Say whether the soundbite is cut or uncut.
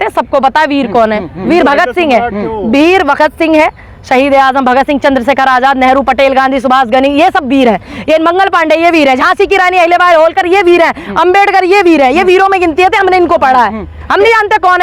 uncut